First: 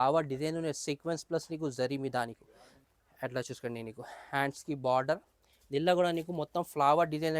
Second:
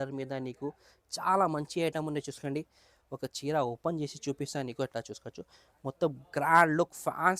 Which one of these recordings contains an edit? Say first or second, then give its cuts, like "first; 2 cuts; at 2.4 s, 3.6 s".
first; 1 cut; at 2.8 s